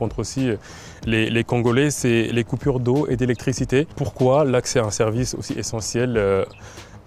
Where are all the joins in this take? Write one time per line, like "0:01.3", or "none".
0:04.0